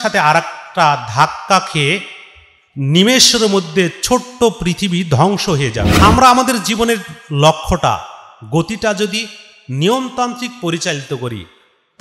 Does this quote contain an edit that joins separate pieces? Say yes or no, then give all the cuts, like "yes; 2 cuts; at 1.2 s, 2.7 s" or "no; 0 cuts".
yes; 1 cut; at 5.9 s